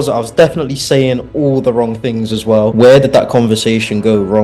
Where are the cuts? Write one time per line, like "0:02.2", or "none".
0:02.7